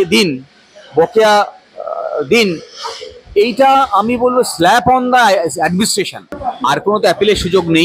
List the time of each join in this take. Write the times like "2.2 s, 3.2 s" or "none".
6.5 s